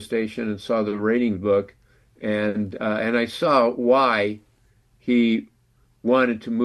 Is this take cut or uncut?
uncut